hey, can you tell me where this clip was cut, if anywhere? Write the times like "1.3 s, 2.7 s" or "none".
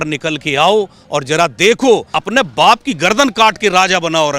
2.1 s